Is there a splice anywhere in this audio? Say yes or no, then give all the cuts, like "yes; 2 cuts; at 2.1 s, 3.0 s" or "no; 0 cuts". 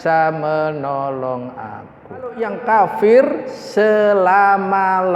yes; 1 cut; at 2.4 s